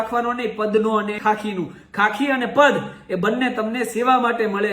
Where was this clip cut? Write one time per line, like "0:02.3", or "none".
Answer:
0:01.2